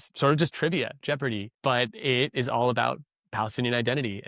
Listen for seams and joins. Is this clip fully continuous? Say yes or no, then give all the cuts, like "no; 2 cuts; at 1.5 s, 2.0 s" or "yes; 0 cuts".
no; 1 cut; at 1.5 s